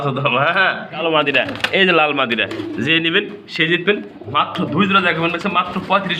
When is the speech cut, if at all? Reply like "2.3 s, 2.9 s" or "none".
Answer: 1.0 s